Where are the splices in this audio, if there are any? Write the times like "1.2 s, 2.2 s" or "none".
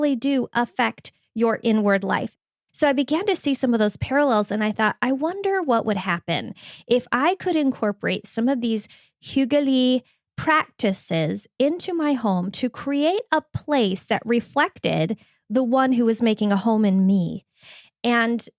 2.3 s